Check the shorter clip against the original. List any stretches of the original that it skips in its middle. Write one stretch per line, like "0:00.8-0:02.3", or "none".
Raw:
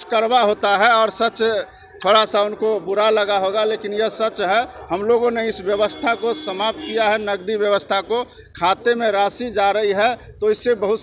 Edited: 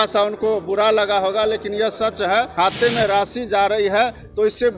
0:04.7-0:08.5